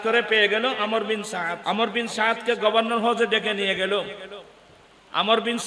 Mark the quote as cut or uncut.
cut